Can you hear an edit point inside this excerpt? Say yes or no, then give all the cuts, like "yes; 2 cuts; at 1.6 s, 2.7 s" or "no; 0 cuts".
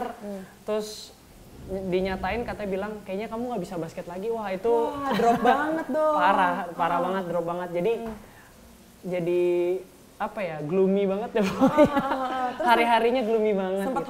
no; 0 cuts